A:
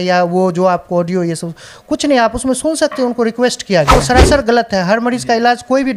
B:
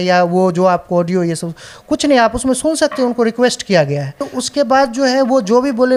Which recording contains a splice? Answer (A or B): A